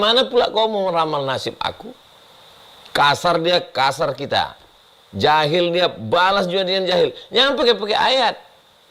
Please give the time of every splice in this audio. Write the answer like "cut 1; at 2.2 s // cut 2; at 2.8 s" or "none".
none

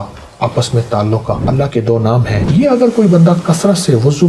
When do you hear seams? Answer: cut 1; at 1.4 s // cut 2; at 2.4 s

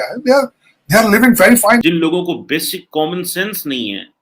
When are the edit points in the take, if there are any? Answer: cut 1; at 1.8 s

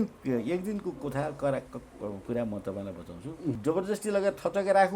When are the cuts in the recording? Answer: cut 1; at 3.6 s

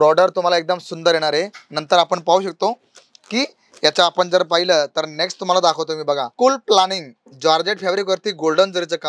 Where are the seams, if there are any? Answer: none

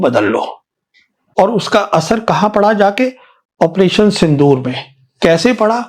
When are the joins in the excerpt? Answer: cut 1; at 1.2 s

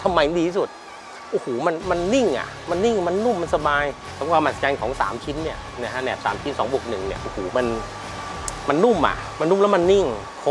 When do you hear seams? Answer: cut 1; at 4.1 s

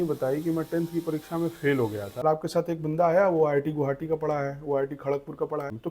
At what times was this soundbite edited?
cut 1; at 2.1 s

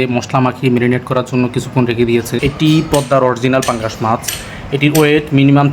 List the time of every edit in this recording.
cut 1; at 2.4 s

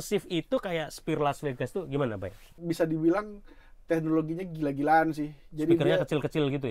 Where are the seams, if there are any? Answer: cut 1; at 2.5 s

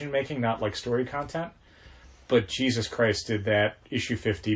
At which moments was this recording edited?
none

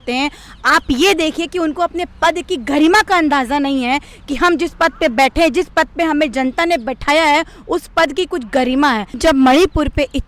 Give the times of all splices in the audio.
cut 1; at 9.2 s

